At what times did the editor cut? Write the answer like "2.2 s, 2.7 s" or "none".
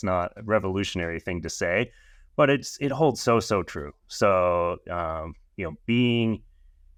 none